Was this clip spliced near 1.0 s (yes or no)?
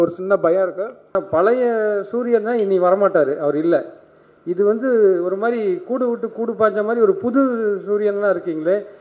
yes